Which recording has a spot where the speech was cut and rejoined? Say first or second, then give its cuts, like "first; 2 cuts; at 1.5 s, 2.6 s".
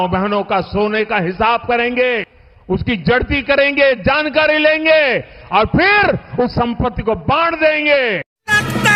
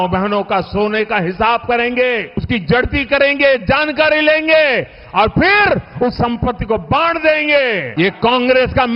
second; 2 cuts; at 2.4 s, 7.9 s